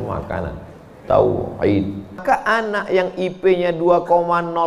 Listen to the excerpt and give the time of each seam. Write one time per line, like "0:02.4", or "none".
0:02.2